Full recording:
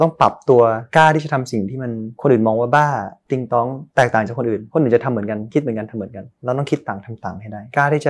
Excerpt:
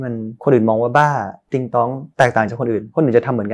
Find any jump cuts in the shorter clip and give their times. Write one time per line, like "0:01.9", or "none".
none